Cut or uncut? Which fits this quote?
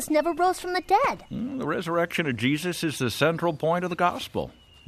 uncut